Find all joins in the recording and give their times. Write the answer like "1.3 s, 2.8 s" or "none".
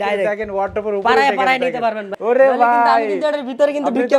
2.1 s